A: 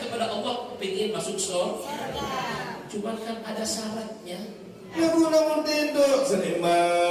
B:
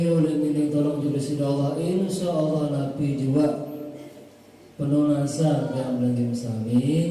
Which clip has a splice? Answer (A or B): A